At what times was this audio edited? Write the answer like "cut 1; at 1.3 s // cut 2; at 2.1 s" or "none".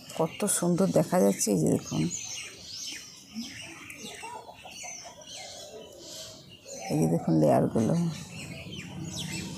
none